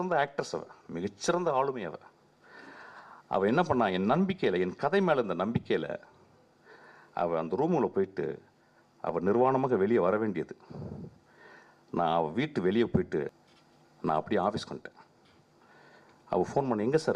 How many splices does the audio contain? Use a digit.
1